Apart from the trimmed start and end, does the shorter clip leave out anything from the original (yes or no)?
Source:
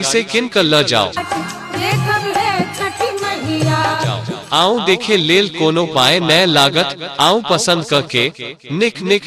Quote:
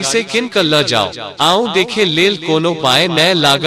yes